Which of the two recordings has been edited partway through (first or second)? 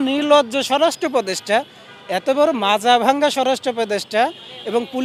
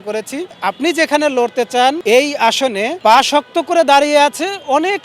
second